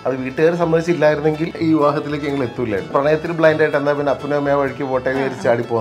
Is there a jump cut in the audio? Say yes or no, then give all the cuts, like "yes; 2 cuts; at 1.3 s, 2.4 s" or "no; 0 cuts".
yes; 2 cuts; at 1.5 s, 2.9 s